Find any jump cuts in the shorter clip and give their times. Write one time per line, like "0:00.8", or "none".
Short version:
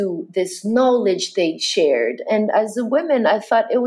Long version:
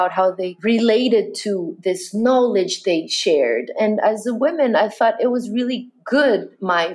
none